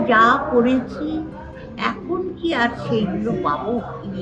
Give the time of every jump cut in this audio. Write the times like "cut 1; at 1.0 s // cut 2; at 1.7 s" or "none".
none